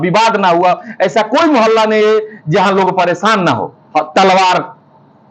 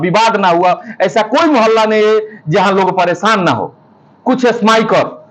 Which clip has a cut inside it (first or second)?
first